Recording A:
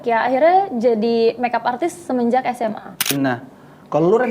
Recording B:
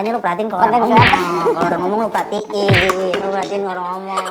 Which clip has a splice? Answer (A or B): A